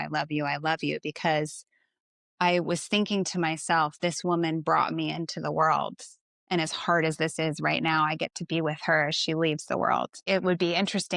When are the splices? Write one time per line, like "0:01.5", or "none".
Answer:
0:10.1